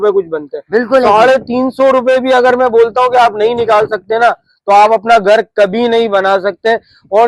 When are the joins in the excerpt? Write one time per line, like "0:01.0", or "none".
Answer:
none